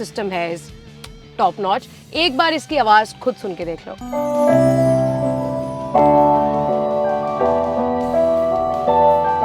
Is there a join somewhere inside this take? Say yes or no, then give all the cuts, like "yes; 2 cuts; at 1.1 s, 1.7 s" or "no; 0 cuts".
no; 0 cuts